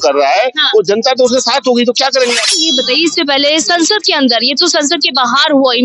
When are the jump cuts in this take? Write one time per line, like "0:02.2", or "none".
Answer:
0:02.8